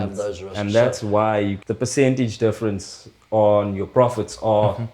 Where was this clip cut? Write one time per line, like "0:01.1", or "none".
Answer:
0:01.6